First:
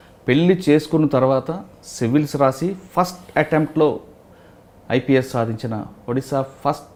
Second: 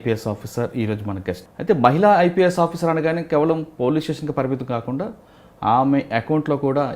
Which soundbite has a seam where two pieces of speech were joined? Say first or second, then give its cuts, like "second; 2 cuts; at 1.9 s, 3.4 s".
second; 1 cut; at 1.5 s